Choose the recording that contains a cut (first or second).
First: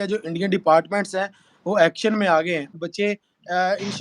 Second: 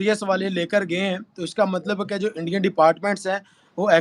first